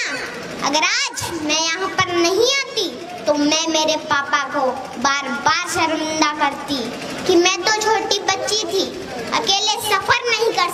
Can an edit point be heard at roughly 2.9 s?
no; 0 cuts

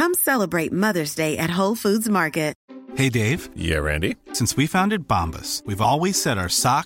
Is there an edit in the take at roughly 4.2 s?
no; 1 cut; at 2.6 s

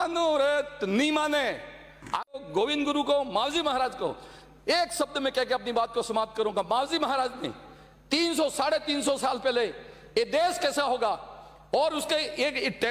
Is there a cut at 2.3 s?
yes; 1 cut; at 2.3 s

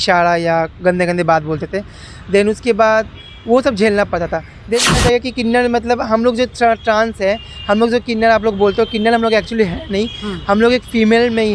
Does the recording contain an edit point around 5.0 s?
yes; 1 cut; at 5.0 s

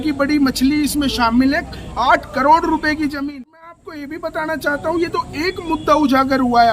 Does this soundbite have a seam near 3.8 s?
yes; 1 cut; at 3.8 s

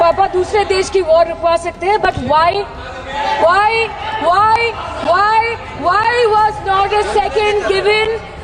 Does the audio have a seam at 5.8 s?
no; 0 cuts

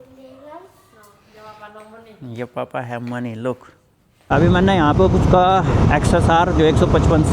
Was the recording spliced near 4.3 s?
yes; 1 cut; at 4.3 s

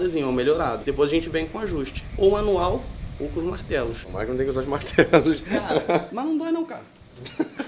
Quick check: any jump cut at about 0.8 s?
yes; 4 cuts; at 0.8 s, 2.0 s, 4.0 s, 6.1 s

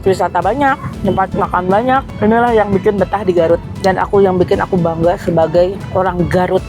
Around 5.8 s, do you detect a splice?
yes; 4 cuts; at 0.9 s, 2.1 s, 3.7 s, 5.8 s

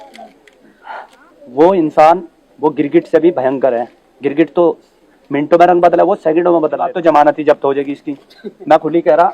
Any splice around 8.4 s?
no; 1 cut; at 6.9 s

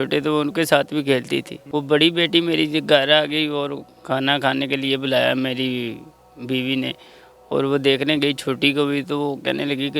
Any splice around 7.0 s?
no; 1 cut; at 1.6 s

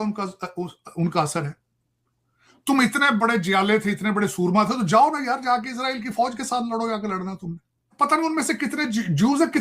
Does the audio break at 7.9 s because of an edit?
yes; 1 cut; at 7.9 s

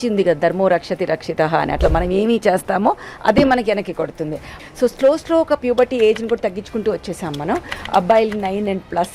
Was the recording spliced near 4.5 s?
yes; 1 cut; at 4.5 s

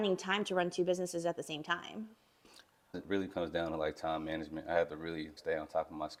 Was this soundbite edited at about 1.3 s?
no; 0 cuts

